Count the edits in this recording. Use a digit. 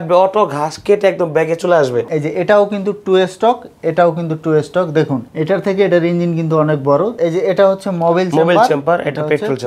2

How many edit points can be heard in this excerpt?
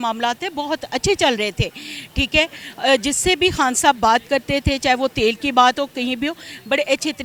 0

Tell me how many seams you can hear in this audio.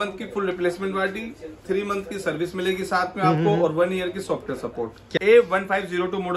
1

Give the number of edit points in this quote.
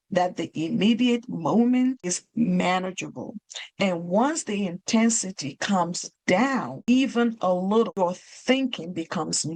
3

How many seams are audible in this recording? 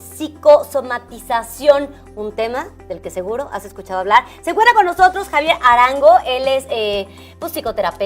1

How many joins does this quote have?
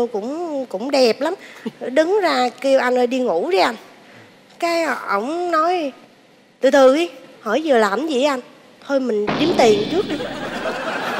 0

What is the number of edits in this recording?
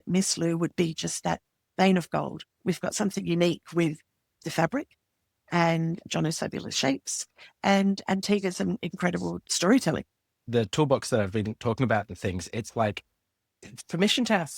3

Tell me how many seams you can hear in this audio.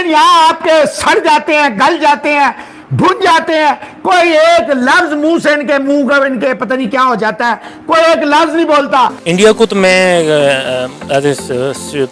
1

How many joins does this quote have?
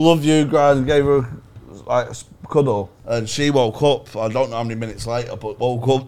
1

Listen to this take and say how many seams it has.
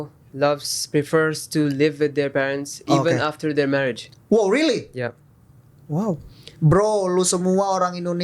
1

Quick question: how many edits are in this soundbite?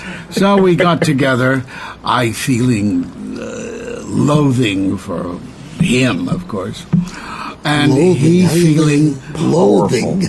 0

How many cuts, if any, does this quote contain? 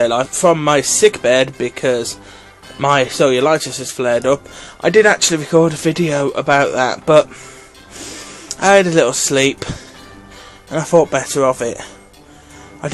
0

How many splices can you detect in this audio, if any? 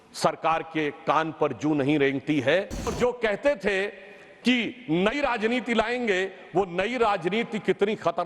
1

